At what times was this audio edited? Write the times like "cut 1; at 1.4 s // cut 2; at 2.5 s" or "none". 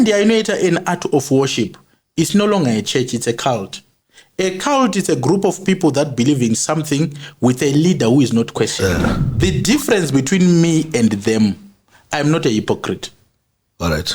cut 1; at 8.7 s